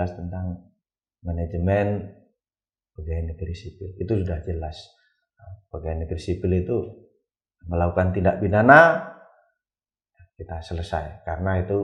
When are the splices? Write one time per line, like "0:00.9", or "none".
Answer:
none